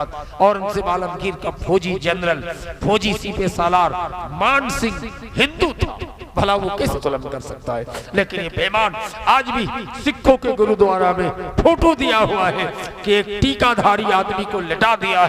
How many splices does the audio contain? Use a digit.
1